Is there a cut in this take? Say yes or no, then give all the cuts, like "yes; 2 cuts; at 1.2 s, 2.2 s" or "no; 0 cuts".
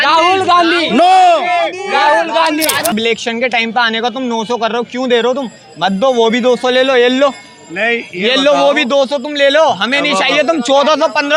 yes; 1 cut; at 2.9 s